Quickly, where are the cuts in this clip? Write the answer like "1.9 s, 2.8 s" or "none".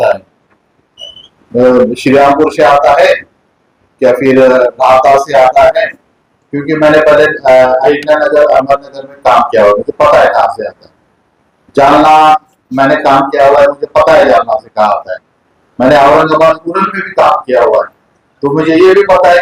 none